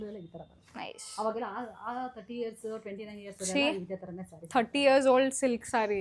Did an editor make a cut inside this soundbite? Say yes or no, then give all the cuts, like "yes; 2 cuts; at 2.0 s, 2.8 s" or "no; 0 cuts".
no; 0 cuts